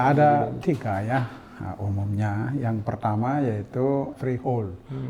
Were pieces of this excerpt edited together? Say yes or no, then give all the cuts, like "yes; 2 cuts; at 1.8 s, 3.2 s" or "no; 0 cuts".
yes; 1 cut; at 4.2 s